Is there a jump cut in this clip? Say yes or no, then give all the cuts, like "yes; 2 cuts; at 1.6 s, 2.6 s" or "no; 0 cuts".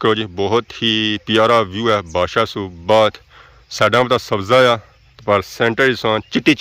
no; 0 cuts